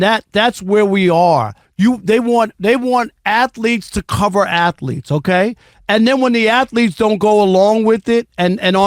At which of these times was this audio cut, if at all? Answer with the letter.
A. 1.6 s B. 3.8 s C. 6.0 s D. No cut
A